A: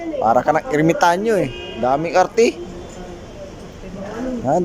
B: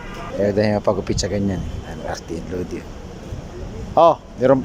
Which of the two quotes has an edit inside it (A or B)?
A